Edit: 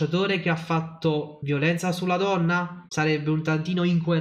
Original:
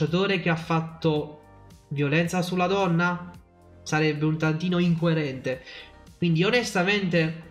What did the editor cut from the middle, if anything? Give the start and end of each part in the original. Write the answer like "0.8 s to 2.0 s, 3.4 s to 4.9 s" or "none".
1.4 s to 1.9 s, 3.3 s to 3.7 s